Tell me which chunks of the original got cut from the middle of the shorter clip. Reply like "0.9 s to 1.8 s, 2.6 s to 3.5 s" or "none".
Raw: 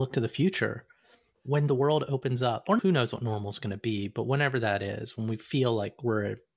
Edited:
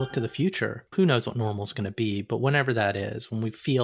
1.0 s to 2.8 s